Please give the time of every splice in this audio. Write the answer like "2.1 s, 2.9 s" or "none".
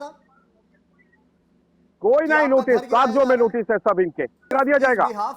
4.5 s